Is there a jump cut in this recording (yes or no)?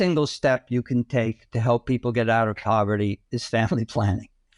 no